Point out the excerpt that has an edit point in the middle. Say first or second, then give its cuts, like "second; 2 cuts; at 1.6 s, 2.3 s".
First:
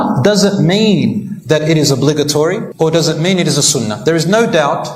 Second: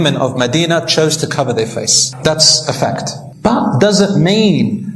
first; 1 cut; at 2.7 s